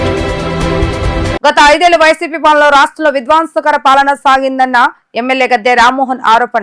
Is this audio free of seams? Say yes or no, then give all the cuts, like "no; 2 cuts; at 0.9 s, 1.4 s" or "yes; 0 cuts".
no; 1 cut; at 1.3 s